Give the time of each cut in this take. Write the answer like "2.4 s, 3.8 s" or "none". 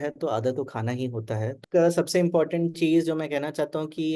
1.6 s